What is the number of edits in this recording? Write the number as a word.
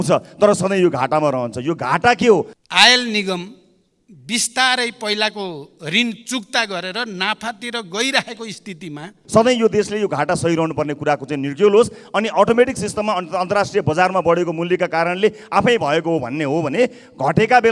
two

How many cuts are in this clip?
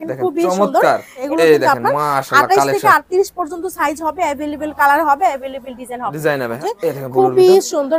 two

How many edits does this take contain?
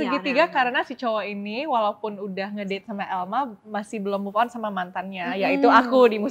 zero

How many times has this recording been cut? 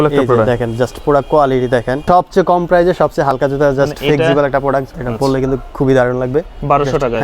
two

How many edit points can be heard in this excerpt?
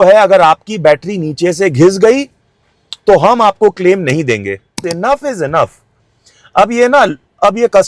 one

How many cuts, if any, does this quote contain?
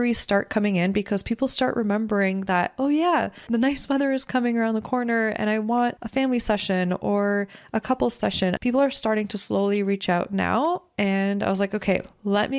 three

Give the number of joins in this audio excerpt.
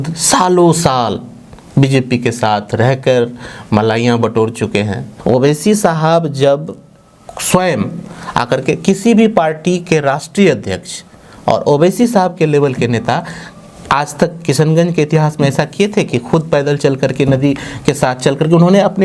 one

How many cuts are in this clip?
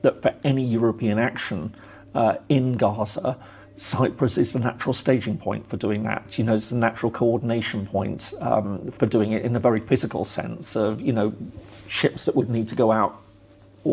zero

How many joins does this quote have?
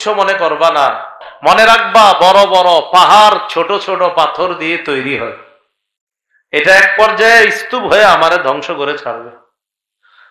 one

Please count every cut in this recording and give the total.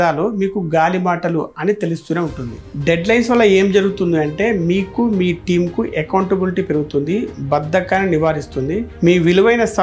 zero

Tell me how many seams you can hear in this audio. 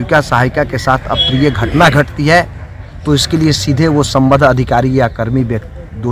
zero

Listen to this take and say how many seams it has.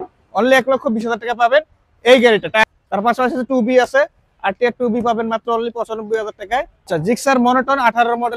two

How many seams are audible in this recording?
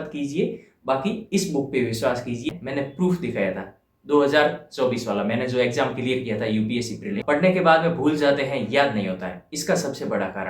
two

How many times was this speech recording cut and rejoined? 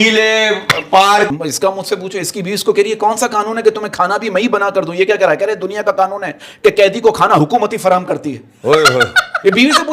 one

